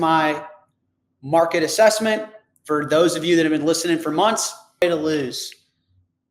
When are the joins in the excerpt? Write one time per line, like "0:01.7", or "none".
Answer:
0:04.6